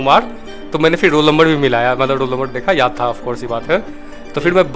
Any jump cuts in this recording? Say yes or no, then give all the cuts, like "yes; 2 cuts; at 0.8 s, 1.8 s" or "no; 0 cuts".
no; 0 cuts